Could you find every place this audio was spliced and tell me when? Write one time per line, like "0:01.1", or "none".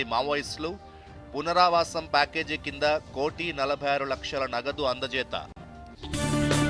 0:05.7

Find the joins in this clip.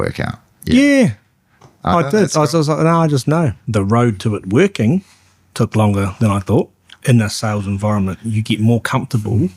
0:03.6
0:06.8

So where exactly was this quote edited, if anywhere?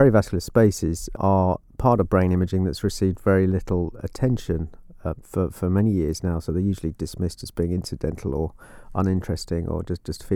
0:01.1

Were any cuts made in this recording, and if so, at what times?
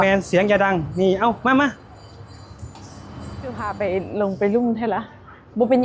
0:03.8

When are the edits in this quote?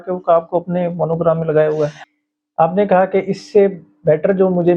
0:02.0

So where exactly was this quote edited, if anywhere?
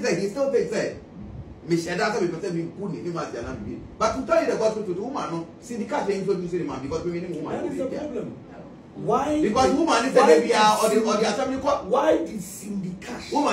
none

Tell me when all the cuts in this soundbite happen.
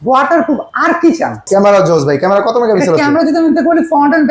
0:01.4

